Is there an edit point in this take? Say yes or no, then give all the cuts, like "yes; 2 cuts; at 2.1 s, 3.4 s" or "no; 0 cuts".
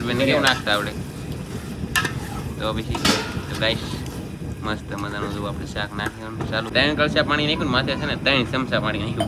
yes; 1 cut; at 6.7 s